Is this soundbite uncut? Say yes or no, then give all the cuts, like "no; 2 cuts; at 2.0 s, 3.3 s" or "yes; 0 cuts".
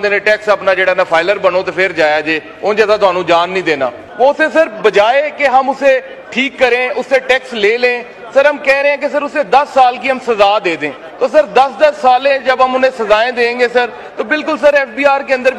no; 2 cuts; at 4.0 s, 11.0 s